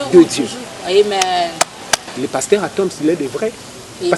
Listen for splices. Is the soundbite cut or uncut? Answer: cut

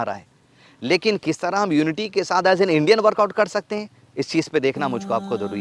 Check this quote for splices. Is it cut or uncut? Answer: uncut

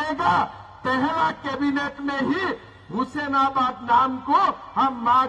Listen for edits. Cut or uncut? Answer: uncut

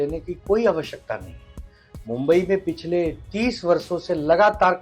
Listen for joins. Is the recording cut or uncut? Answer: uncut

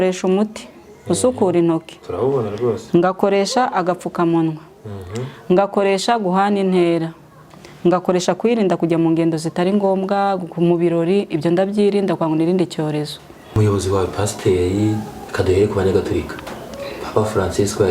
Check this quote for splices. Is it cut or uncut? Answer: cut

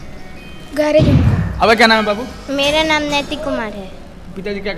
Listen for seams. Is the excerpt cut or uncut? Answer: cut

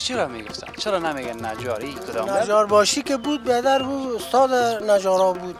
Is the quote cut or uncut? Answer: uncut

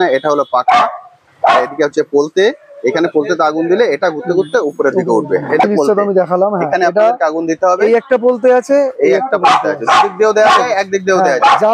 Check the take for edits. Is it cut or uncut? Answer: cut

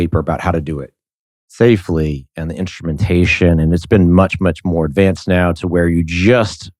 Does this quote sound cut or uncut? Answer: uncut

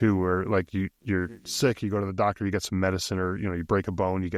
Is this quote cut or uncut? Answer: uncut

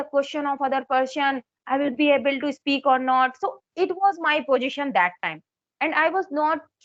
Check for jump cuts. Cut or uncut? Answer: uncut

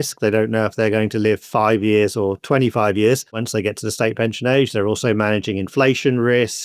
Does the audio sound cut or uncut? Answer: cut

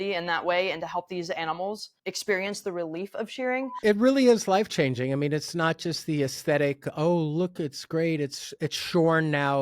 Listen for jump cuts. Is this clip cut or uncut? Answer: cut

